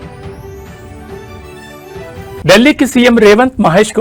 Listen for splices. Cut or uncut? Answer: uncut